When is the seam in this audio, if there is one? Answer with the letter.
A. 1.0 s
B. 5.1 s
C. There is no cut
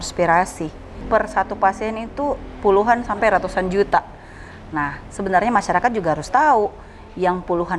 A